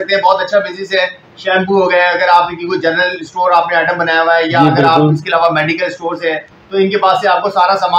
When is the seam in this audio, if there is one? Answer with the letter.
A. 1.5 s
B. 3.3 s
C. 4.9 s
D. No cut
D